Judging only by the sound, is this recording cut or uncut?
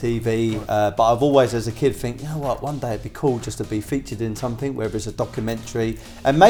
uncut